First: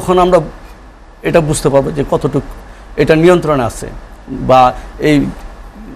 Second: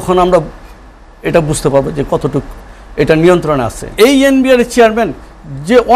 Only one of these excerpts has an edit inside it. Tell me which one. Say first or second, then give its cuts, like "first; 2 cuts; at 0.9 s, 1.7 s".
second; 1 cut; at 3.9 s